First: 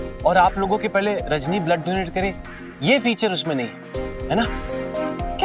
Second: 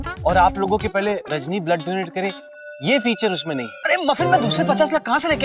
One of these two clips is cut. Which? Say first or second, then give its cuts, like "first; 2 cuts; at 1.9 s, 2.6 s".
second; 1 cut; at 3.8 s